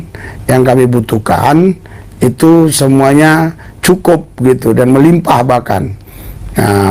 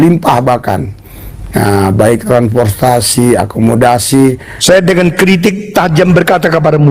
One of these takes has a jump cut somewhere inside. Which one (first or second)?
second